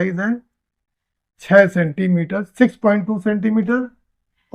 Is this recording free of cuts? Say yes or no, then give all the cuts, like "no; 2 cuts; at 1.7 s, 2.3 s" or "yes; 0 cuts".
yes; 0 cuts